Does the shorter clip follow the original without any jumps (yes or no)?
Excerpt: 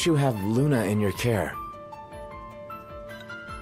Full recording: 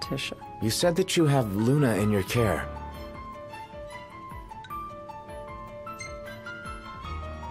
no